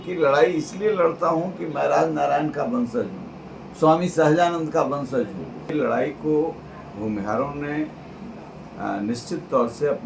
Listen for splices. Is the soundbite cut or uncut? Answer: cut